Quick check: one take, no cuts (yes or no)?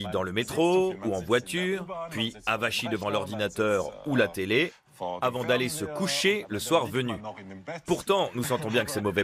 yes